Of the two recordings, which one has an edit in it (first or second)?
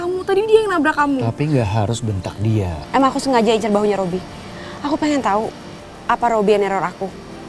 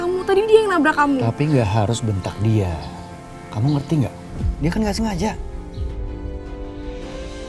first